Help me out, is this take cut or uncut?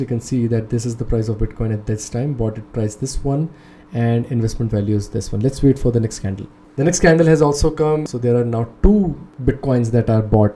cut